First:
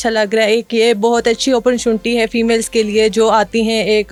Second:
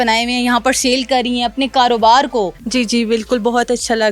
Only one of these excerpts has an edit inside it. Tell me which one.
second; 1 cut; at 2.6 s

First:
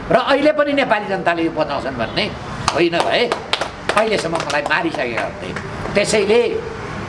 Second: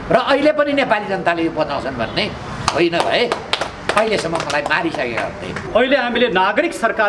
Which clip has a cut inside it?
second; 1 cut; at 5.6 s

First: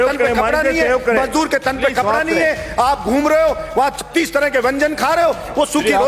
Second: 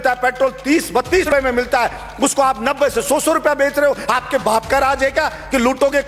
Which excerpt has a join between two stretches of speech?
second; 1 cut; at 1.3 s

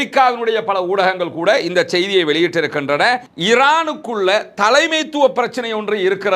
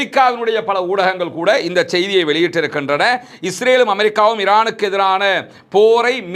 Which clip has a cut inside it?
first; 1 cut; at 3.3 s

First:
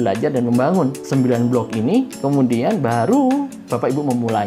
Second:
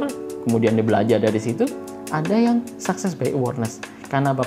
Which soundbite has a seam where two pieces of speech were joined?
first; 3 cuts; at 1.0 s, 2.1 s, 3.6 s

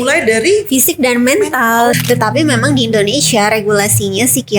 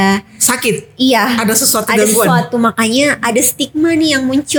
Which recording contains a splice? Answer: first; 1 cut; at 1.9 s

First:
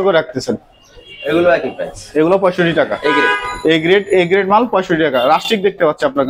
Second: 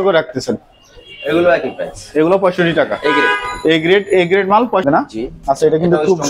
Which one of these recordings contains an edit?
second; 1 cut; at 4.8 s

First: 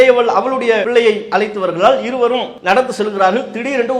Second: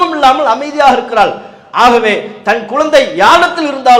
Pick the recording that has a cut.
first; 2 cuts; at 0.9 s, 2.5 s

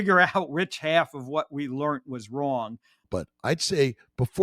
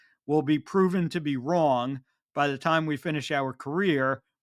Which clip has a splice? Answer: first; 1 cut; at 3.0 s

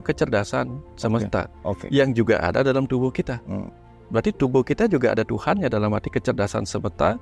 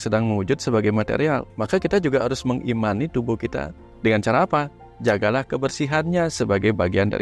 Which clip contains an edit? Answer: second; 2 cuts; at 1.5 s, 3.8 s

